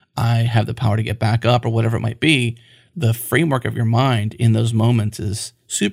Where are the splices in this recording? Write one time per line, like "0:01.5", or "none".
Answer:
0:02.9